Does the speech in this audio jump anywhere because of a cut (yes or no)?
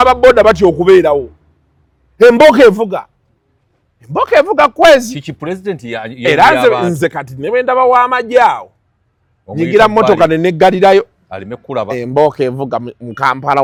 no